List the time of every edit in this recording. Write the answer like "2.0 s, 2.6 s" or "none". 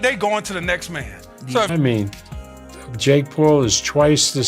1.7 s